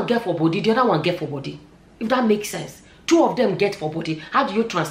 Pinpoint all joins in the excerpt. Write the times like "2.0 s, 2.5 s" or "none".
none